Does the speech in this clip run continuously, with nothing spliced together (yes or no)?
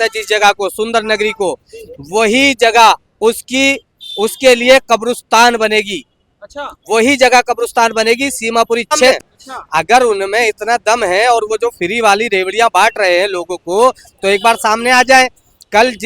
no